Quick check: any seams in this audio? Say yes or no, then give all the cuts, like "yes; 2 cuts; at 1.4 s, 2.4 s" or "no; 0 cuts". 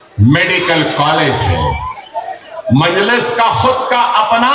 yes; 1 cut; at 2.1 s